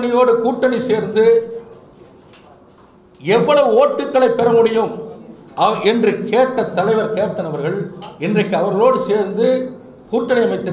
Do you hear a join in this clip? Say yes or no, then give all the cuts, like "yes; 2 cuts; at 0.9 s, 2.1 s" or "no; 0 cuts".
no; 0 cuts